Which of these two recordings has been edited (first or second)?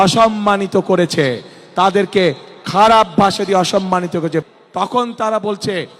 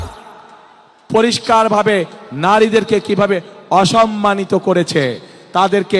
first